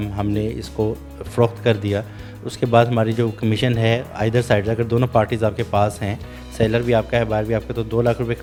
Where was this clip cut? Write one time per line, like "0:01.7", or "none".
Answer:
none